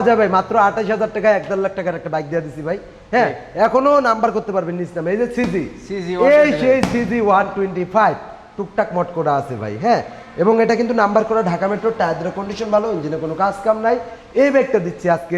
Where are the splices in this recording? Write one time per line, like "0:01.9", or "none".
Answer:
none